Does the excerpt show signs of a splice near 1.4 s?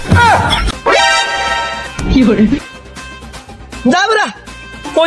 no; 0 cuts

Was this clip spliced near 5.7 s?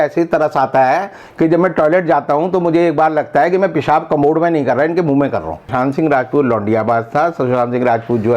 yes; 1 cut; at 5.7 s

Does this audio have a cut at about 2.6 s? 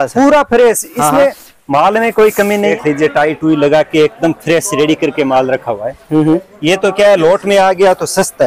yes; 1 cut; at 2.6 s

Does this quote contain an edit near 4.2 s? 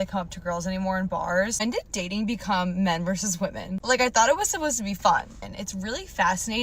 no; 2 cuts; at 1.5 s, 5.4 s

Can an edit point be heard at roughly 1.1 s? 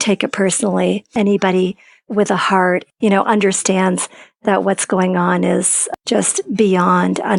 yes; 3 cuts; at 1.1 s, 2.8 s, 5.9 s

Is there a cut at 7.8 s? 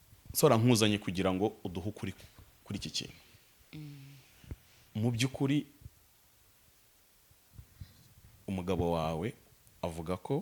no; 0 cuts

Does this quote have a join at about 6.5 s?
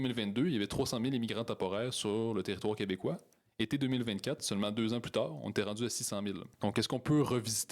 yes; 1 cut; at 6.5 s

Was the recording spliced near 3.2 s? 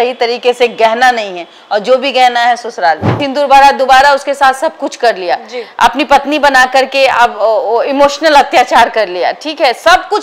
yes; 1 cut; at 3.2 s

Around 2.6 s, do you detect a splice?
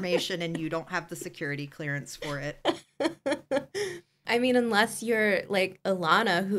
yes; 1 cut; at 2.6 s

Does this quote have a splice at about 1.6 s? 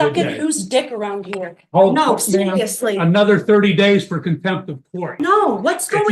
no; 1 cut; at 5.1 s

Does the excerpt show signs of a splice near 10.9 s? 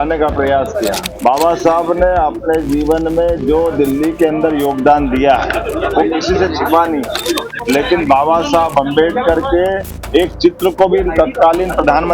no; 2 cuts; at 1.1 s, 7.5 s

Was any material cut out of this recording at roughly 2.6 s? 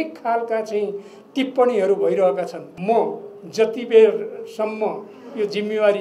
yes; 1 cut; at 2.6 s

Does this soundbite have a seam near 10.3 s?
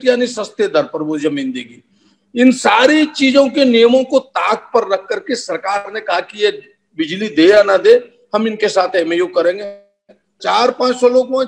yes; 1 cut; at 10.3 s

